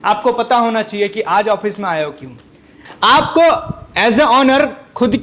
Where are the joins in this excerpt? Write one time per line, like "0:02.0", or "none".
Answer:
0:02.8

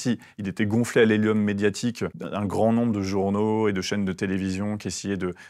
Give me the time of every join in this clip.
0:02.2

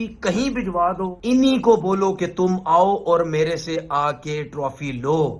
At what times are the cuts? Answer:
0:01.2

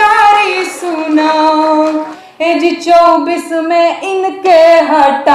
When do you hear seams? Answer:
0:02.2

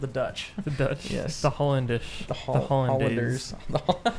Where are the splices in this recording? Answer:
none

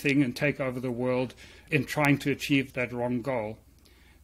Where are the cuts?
0:01.6
0:02.7

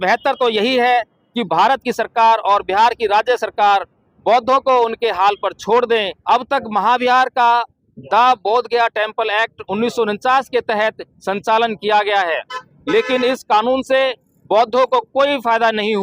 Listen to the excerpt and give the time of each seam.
0:06.1

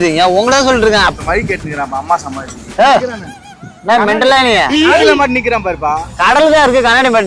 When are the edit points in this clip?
0:01.2
0:02.6

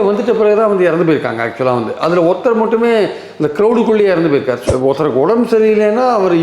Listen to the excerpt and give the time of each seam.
0:04.6

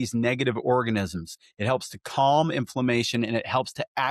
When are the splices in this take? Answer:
none

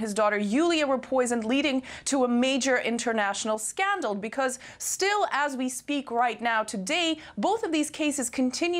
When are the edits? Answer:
0:06.1

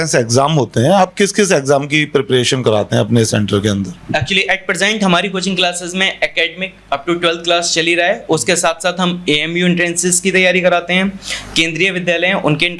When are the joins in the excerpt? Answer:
none

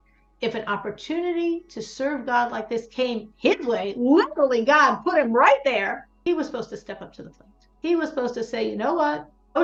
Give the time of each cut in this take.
none

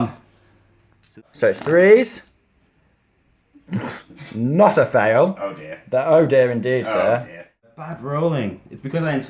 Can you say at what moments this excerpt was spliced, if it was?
0:01.0
0:07.6

